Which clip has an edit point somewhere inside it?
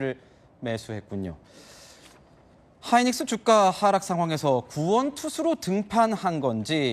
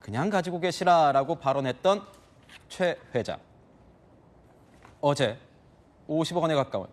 first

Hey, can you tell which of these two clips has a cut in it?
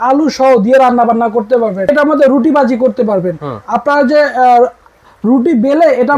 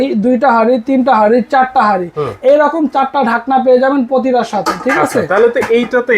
first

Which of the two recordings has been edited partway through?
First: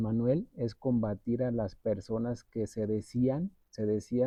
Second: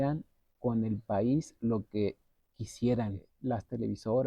second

